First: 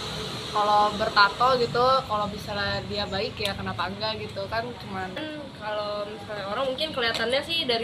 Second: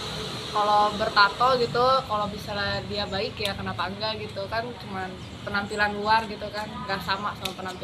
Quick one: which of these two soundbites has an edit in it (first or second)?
first